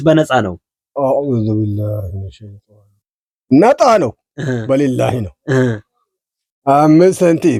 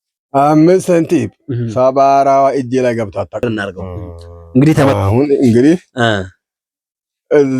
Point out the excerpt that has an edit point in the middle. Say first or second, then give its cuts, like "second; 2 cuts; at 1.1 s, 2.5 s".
second; 1 cut; at 3.4 s